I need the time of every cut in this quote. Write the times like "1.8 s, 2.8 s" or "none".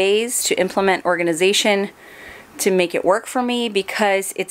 none